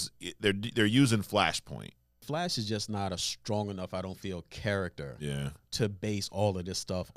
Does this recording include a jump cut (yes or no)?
yes